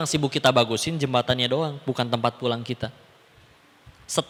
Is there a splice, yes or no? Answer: no